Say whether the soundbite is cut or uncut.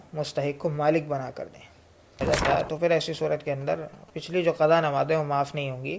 cut